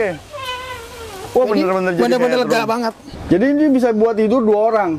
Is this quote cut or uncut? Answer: cut